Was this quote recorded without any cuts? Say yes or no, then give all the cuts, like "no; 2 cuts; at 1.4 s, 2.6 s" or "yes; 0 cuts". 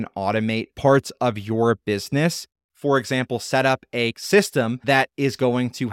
no; 1 cut; at 4.2 s